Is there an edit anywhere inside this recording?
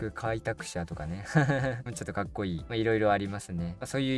no; 0 cuts

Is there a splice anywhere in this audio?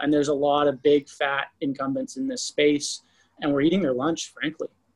no; 0 cuts

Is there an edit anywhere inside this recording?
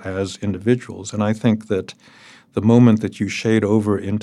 no; 0 cuts

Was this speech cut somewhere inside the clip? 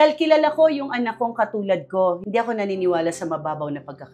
yes; 1 cut; at 2.2 s

